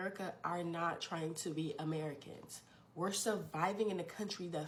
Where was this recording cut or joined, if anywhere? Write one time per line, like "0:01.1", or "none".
none